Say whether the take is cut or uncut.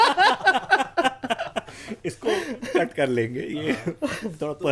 uncut